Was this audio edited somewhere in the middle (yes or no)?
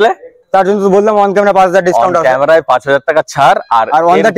no